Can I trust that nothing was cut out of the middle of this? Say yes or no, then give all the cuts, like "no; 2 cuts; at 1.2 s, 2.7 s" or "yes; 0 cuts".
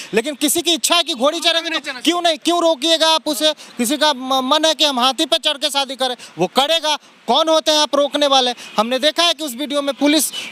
yes; 0 cuts